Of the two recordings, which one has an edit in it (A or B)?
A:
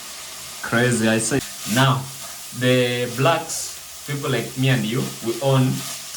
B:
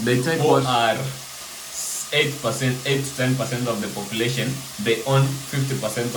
A